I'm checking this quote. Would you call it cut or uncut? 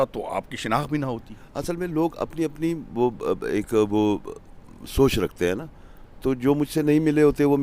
uncut